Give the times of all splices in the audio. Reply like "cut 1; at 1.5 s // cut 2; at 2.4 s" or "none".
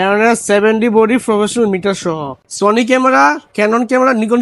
cut 1; at 2.5 s